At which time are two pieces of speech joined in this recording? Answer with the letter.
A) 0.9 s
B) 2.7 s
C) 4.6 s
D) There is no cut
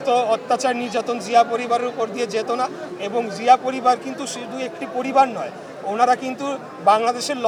D